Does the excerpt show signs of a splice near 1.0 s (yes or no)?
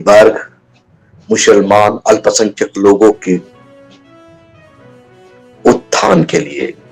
no